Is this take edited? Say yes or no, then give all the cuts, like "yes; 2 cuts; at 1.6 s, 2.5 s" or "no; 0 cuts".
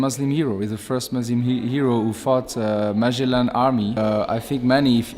yes; 1 cut; at 4.0 s